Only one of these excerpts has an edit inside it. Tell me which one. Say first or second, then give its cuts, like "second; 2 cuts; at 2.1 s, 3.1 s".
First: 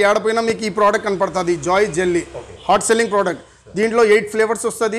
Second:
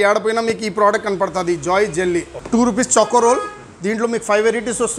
second; 1 cut; at 2.4 s